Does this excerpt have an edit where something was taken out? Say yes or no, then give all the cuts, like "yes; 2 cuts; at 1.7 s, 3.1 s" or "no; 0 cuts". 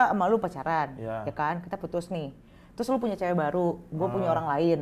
no; 0 cuts